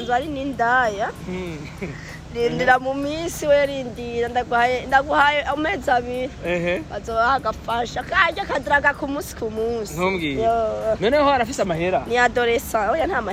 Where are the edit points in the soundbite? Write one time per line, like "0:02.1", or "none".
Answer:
none